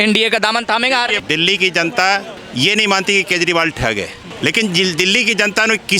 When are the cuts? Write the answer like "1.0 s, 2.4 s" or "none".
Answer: 1.2 s, 2.4 s, 4.2 s